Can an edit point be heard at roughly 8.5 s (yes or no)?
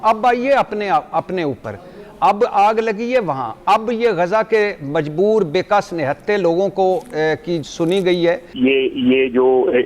yes